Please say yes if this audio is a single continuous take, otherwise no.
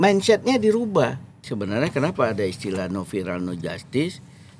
no